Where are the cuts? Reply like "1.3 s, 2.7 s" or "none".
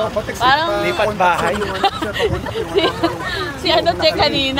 none